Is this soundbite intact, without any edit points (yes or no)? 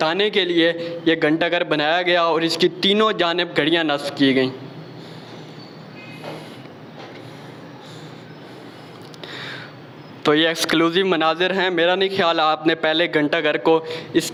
yes